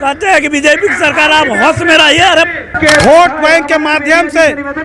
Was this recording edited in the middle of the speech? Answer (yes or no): yes